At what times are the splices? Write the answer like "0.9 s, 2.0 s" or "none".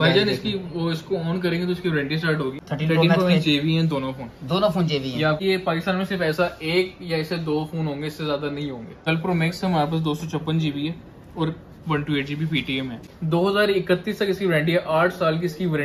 2.6 s, 5.4 s, 9.0 s, 13.1 s